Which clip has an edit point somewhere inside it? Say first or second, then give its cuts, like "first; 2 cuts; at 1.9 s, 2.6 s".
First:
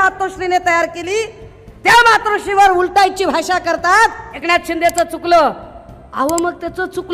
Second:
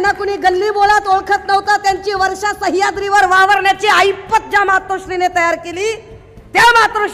first; 1 cut; at 4.3 s